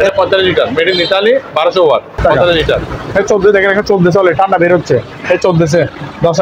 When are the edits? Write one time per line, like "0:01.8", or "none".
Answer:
0:02.9